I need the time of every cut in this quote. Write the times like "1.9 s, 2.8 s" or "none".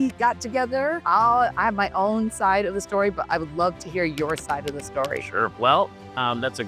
1.0 s, 5.5 s